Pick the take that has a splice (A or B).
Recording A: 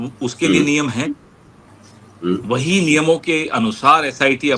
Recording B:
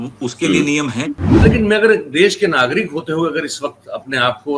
B